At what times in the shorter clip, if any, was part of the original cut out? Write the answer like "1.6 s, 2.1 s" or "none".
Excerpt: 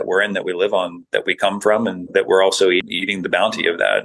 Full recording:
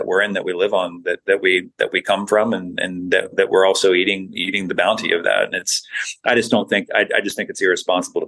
1.0 s, 2.1 s, 2.9 s